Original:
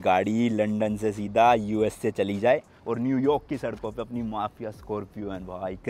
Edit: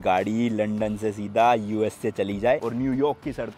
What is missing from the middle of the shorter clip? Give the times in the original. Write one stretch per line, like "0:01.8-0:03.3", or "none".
0:02.6-0:02.9